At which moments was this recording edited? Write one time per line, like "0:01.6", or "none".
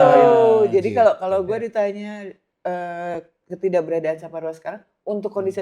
none

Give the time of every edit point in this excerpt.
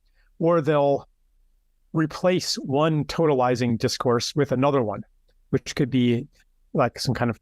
none

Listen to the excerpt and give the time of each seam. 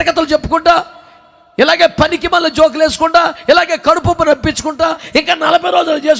0:05.0

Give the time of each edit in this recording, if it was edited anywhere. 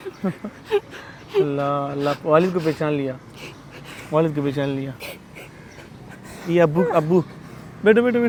none

